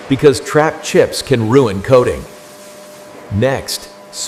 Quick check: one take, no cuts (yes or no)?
yes